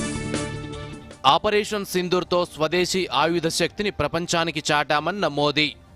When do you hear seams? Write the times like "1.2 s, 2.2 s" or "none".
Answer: 1.0 s